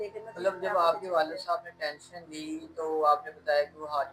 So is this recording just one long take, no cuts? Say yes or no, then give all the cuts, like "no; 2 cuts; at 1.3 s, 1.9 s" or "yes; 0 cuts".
yes; 0 cuts